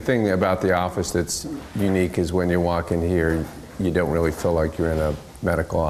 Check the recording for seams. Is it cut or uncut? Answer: uncut